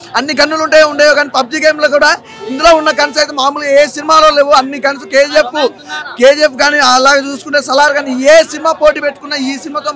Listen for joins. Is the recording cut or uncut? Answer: uncut